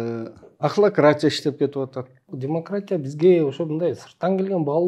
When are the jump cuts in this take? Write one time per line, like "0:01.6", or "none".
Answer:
0:02.3